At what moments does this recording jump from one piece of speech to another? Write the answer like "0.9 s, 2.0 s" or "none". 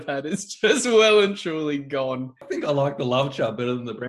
2.5 s